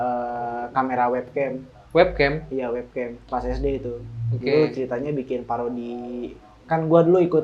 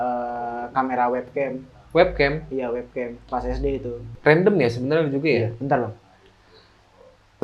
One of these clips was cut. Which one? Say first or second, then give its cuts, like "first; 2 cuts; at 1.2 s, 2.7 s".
second; 1 cut; at 4.1 s